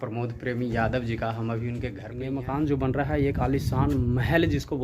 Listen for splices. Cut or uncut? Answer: cut